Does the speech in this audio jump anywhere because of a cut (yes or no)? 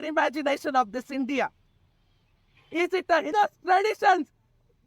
yes